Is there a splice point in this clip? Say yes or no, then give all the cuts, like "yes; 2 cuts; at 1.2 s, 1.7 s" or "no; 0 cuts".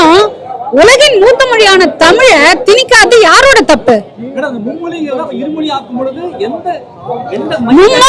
no; 0 cuts